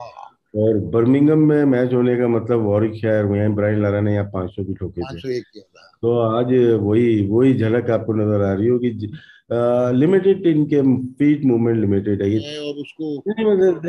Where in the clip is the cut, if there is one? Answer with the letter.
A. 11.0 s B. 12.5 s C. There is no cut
B